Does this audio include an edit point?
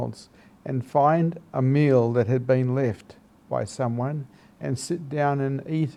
no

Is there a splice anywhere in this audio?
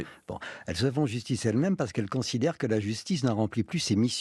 no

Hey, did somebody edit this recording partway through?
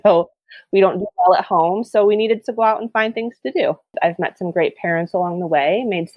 yes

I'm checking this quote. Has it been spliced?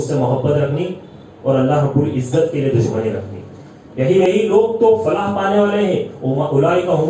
yes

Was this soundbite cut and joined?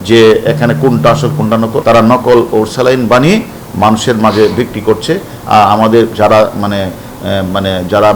yes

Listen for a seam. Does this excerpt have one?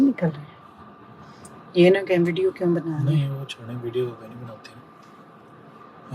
no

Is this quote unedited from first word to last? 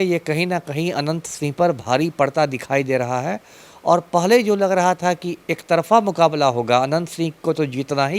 yes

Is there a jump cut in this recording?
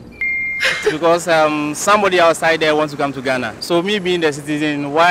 yes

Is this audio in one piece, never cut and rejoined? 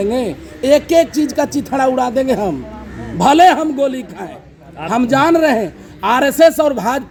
yes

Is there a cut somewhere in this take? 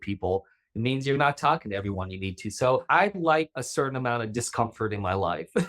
yes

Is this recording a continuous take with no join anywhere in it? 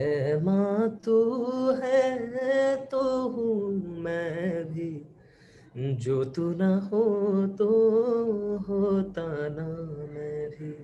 yes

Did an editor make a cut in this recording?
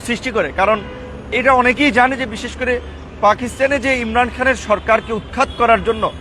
no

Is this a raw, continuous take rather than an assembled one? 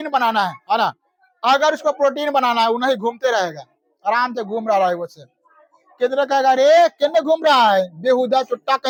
yes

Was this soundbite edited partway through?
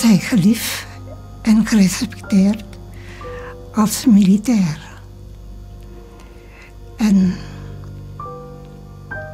no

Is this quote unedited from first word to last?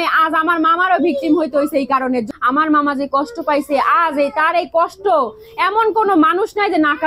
no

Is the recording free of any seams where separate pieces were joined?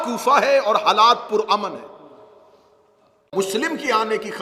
no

